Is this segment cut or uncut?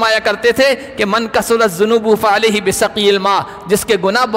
uncut